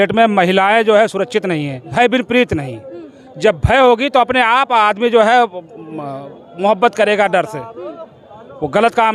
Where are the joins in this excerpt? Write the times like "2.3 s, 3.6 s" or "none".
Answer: 1.8 s

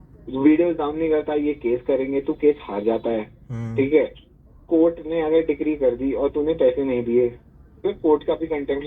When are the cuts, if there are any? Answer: 7.8 s

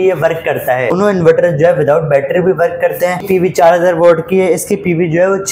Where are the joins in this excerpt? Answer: 0.9 s, 3.3 s

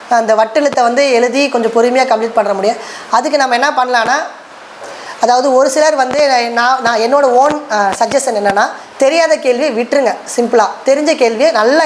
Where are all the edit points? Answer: none

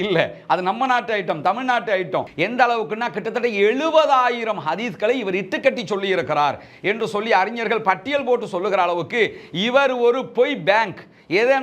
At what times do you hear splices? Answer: 2.3 s

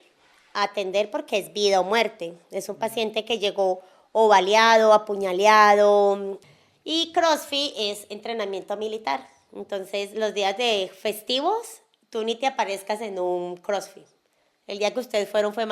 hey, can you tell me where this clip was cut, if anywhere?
6.3 s

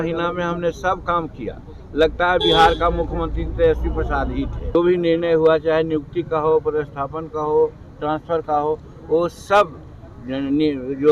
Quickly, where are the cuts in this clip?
4.7 s

